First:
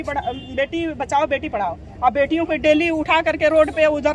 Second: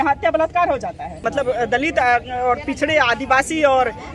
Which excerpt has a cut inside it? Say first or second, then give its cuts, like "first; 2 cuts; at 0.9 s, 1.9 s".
second; 1 cut; at 1.2 s